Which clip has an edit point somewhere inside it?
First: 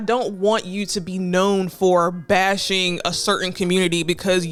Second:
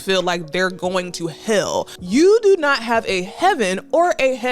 second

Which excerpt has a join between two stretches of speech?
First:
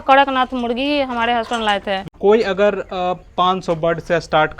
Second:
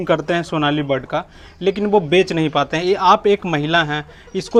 first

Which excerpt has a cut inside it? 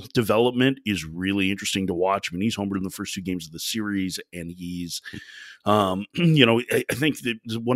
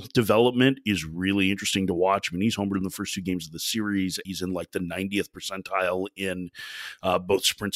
second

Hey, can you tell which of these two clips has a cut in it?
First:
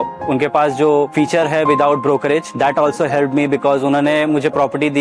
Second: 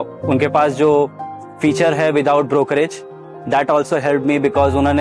first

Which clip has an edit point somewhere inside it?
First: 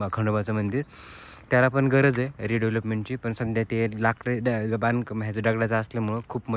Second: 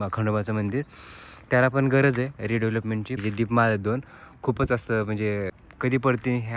second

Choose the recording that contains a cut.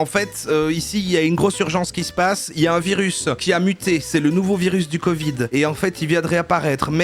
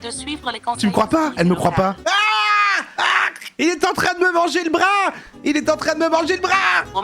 second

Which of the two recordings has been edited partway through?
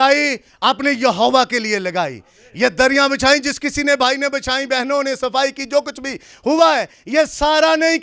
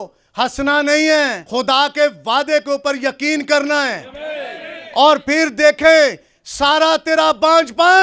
second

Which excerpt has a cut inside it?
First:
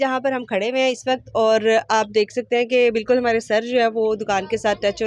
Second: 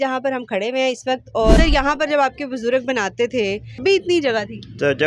second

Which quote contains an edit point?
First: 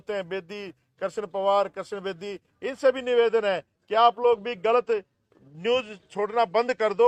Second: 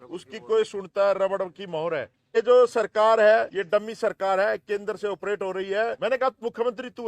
second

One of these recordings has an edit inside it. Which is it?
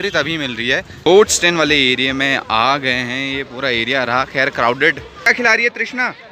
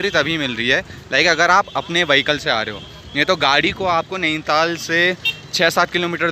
first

